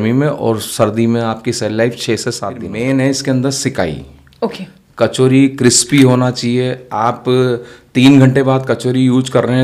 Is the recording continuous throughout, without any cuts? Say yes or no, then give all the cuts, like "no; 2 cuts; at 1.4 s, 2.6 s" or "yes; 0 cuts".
no; 1 cut; at 2.7 s